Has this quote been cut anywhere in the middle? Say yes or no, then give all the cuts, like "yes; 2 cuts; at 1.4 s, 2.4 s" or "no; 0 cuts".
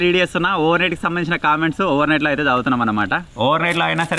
yes; 1 cut; at 3.2 s